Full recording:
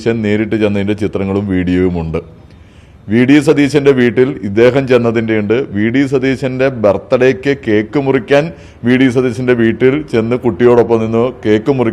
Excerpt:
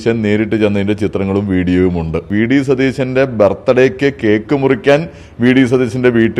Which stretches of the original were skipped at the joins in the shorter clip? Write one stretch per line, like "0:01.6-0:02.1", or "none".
0:02.3-0:05.7